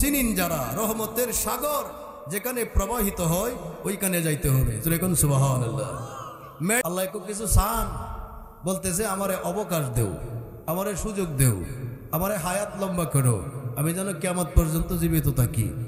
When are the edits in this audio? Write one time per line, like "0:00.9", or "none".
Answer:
0:06.8